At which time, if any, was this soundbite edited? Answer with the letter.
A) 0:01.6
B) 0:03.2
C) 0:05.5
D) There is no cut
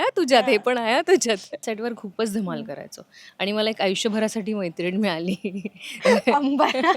A